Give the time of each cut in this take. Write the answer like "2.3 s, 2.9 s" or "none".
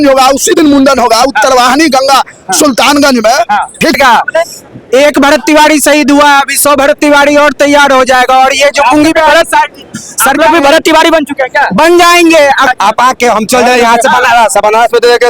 4.0 s, 12.7 s